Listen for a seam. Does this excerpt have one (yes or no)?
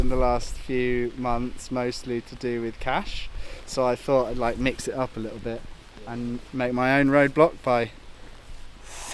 no